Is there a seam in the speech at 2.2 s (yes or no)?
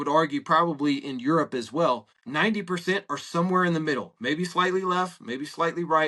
yes